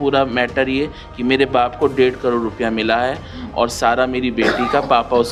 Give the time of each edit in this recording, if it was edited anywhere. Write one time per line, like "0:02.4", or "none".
none